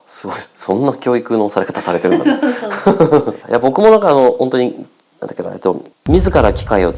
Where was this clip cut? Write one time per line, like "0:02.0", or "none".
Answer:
0:03.4
0:05.9